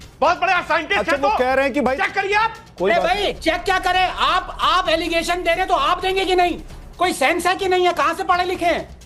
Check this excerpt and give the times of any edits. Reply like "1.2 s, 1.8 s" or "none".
none